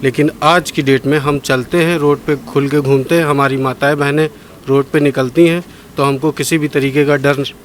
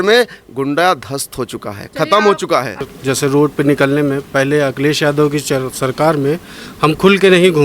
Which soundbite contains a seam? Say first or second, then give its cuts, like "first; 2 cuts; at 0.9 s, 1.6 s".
second; 1 cut; at 2.9 s